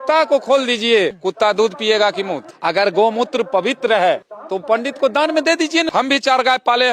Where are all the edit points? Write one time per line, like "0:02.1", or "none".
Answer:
0:02.4
0:04.6
0:05.9